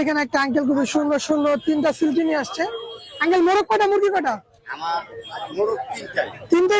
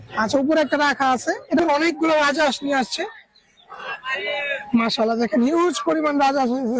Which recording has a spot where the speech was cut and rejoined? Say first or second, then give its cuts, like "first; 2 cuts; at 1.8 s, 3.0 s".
second; 1 cut; at 1.6 s